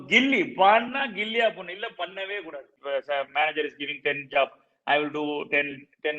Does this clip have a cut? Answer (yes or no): yes